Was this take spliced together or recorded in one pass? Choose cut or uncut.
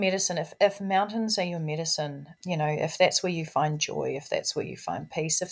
cut